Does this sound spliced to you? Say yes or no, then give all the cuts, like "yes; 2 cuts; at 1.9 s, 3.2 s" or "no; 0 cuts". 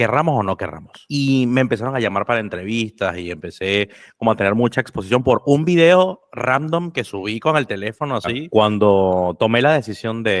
yes; 2 cuts; at 1.0 s, 8.4 s